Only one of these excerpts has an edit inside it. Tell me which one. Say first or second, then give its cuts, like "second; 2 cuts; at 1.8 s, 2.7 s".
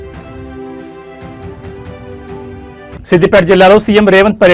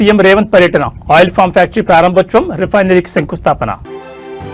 first; 1 cut; at 2.5 s